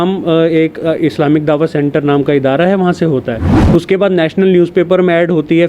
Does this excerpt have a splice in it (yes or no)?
yes